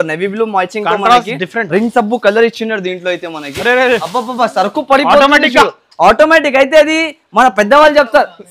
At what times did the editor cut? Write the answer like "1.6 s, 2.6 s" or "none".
none